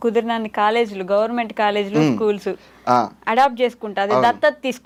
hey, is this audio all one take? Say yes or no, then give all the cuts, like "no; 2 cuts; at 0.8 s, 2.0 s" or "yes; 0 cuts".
yes; 0 cuts